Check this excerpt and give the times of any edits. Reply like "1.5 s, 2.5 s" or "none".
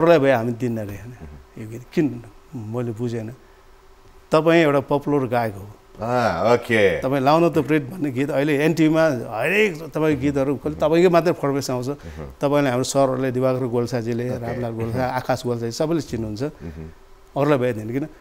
none